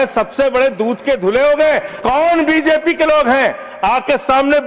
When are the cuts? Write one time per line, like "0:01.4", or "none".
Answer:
0:01.9